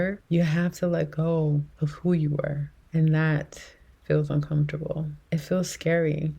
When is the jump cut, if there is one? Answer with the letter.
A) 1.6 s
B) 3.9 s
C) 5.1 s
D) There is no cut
C